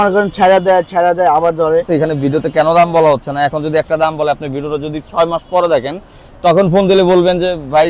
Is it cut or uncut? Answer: cut